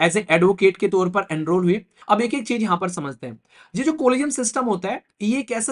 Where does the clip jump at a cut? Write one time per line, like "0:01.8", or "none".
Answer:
0:01.9